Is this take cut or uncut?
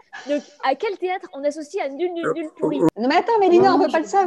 cut